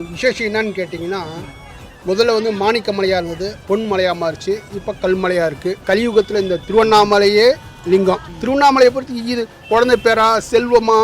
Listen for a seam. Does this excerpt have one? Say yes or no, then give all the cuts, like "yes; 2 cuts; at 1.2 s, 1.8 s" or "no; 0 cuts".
yes; 3 cuts; at 3.6 s, 5.8 s, 8.3 s